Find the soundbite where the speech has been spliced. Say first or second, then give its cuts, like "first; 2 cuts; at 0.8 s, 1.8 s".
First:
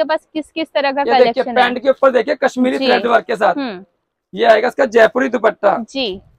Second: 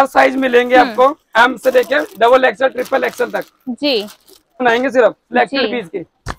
second; 1 cut; at 4.6 s